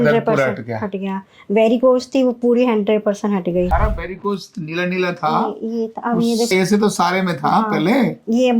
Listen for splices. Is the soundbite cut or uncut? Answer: cut